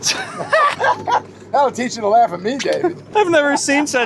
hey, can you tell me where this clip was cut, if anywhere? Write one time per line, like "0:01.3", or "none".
0:03.1